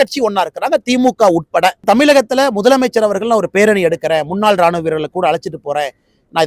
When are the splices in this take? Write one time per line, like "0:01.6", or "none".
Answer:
0:01.8